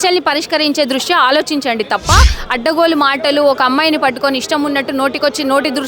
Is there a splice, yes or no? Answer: yes